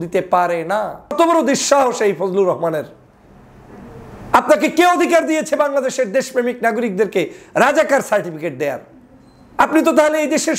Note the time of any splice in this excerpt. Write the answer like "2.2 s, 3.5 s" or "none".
1.1 s